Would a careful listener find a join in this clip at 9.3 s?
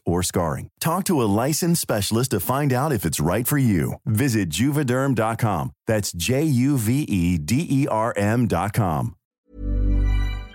yes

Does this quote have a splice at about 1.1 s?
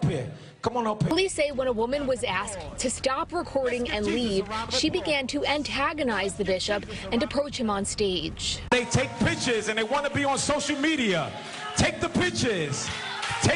yes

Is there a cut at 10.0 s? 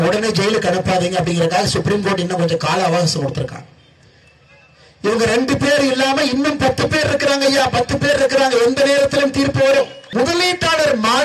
yes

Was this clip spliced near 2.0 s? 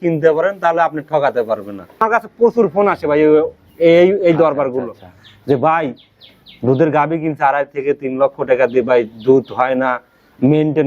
yes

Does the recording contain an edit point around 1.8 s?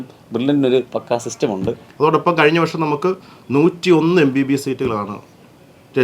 yes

